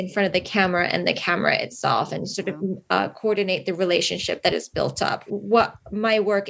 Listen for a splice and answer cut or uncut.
cut